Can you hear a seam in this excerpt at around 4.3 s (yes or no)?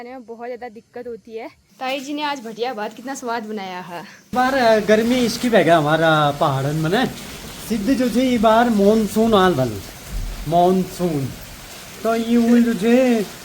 yes